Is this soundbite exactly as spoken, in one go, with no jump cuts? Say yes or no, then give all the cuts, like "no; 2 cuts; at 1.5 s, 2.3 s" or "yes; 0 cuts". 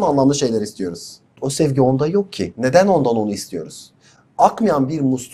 no; 1 cut; at 1.4 s